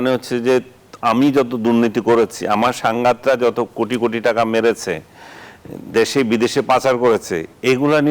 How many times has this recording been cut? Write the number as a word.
zero